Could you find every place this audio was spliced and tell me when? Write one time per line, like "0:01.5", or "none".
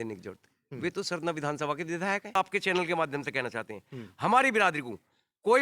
0:02.3

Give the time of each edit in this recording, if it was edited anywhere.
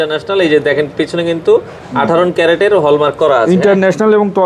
none

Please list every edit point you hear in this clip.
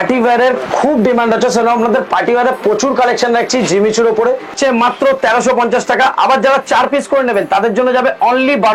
0:04.5

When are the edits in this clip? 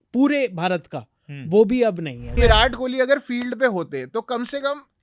0:02.4

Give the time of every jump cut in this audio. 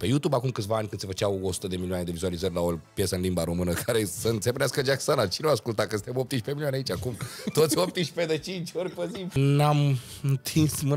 0:09.3

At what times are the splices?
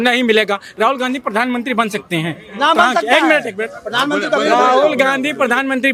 none

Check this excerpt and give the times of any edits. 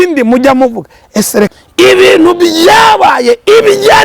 0:01.5

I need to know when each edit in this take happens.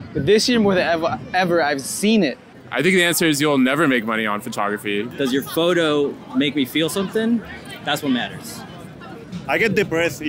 0:02.4
0:05.1
0:09.2

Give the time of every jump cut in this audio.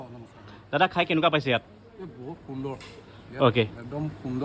none

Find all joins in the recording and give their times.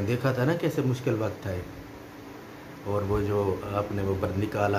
none

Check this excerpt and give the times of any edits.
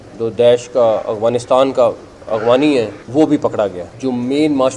0:03.0
0:03.9

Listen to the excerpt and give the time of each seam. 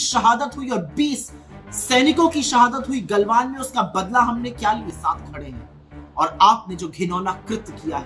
0:04.9

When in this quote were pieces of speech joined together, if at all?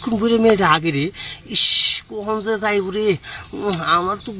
none

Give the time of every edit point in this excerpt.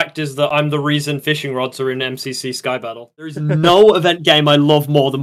0:03.3

